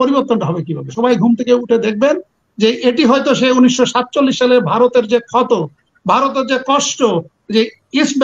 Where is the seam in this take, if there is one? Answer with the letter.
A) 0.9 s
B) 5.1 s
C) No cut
A